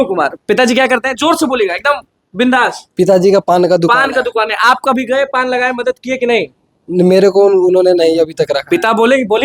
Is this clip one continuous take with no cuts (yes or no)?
yes